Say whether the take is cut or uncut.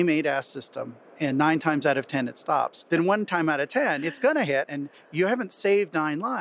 cut